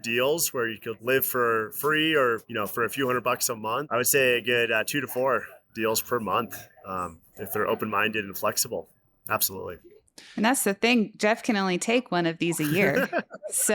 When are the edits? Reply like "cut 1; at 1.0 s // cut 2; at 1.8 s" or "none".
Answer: cut 1; at 0.9 s // cut 2; at 2.5 s // cut 3; at 3.9 s